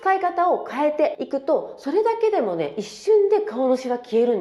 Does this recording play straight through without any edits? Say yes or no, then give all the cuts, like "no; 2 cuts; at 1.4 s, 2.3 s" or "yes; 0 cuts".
yes; 0 cuts